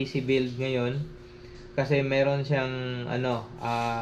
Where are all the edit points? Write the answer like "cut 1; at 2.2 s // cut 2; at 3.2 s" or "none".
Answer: none